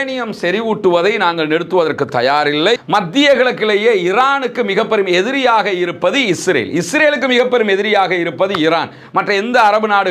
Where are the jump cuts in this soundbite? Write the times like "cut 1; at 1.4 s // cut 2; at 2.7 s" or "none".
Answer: cut 1; at 2.8 s